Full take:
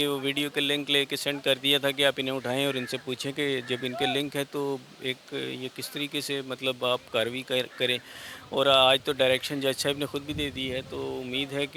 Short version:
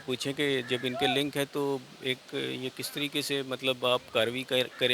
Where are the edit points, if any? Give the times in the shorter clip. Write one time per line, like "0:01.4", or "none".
none

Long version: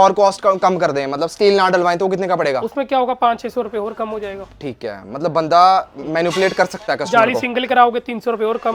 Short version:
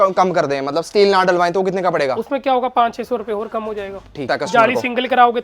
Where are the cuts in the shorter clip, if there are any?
0:04.2

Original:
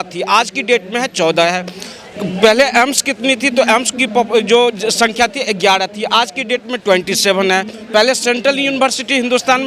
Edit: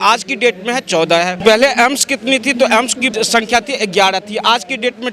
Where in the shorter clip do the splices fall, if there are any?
0:01.4
0:03.1

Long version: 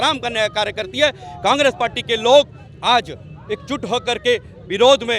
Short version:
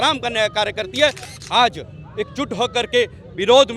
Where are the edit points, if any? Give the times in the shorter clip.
0:01.3

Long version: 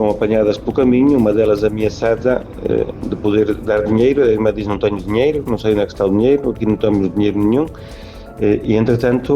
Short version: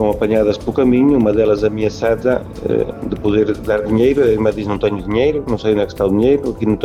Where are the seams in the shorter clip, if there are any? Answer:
none

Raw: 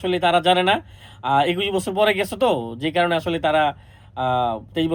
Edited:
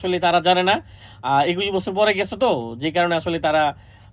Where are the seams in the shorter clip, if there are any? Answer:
none

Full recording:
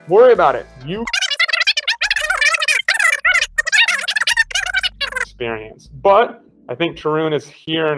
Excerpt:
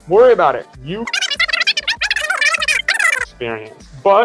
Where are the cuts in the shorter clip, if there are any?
0:03.1

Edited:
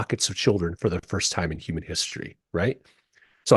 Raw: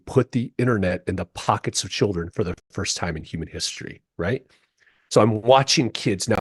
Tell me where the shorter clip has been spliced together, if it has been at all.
0:01.1

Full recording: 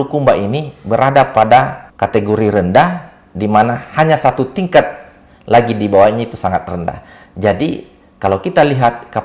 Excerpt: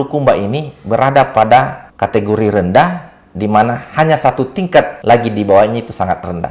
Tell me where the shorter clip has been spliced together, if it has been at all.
0:04.9

